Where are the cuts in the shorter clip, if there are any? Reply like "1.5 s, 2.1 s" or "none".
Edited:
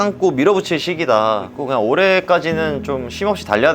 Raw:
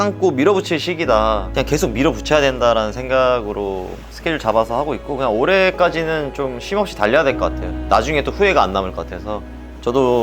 1.5 s

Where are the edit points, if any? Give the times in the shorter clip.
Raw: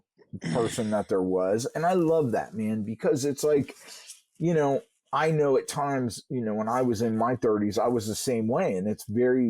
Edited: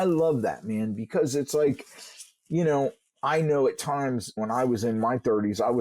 4.3 s

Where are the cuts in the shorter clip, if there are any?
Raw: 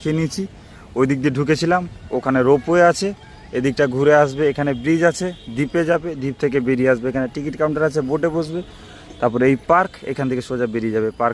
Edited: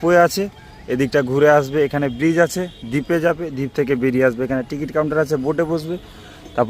none

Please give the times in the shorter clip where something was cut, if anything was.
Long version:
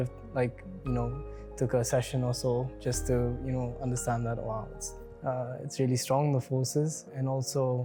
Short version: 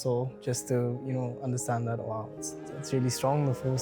2.7 s

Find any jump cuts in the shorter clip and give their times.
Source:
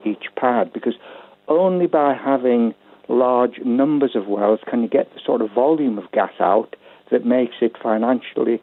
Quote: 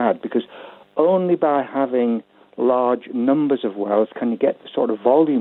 none

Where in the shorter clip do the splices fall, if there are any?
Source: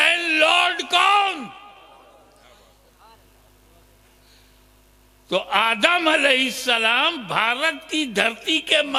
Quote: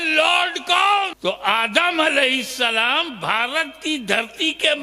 1.1 s

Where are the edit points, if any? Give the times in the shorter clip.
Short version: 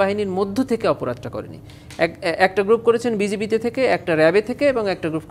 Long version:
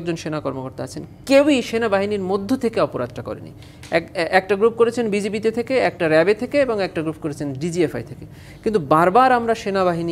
none

